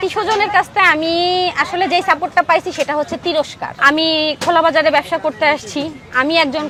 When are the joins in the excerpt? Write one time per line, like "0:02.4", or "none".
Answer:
none

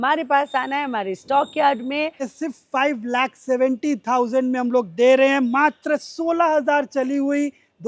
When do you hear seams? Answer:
0:02.3

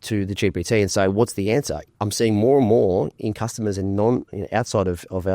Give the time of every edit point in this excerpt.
0:01.8

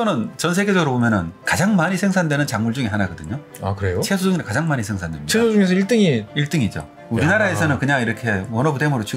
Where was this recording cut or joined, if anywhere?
none

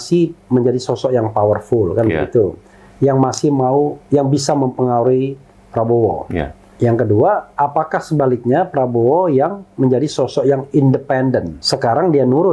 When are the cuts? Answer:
0:06.6
0:11.6

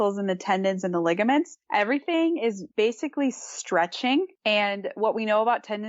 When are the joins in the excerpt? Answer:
0:01.6
0:02.6
0:04.3

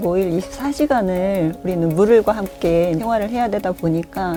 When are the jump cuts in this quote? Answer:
none

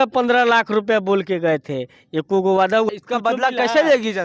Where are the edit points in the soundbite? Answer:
0:02.9

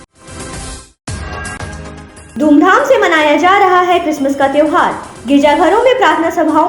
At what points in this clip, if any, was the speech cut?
0:02.2

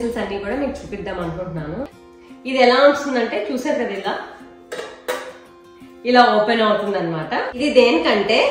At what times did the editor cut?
0:02.0
0:07.5

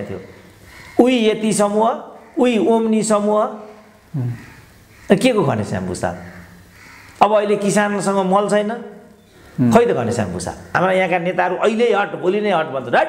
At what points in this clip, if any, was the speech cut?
0:10.7

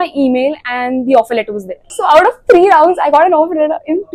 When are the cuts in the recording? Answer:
none

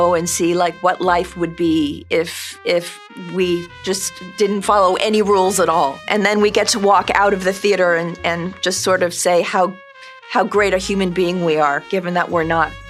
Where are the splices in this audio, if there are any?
none

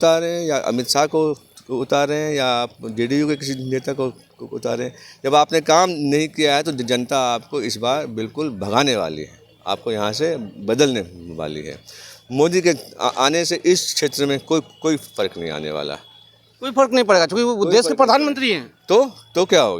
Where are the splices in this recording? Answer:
none

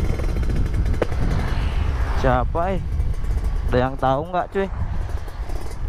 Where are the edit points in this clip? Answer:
none

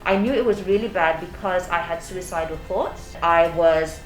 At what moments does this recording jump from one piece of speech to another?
none

